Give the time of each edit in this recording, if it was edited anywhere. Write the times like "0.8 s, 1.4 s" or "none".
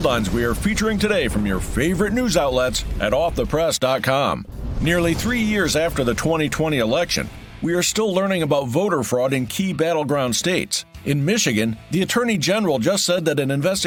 none